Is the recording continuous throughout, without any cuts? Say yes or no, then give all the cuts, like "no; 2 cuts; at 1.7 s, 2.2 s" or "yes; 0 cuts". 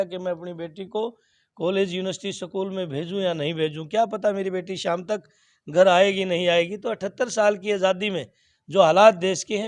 yes; 0 cuts